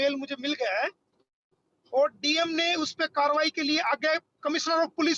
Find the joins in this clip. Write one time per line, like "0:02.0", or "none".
none